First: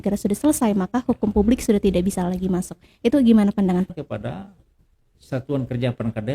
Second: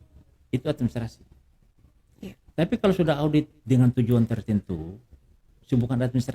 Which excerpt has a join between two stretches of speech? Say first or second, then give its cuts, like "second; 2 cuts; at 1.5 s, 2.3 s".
first; 1 cut; at 3.9 s